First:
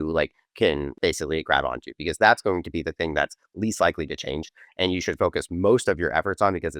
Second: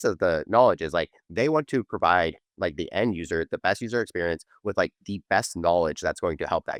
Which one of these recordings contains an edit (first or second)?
first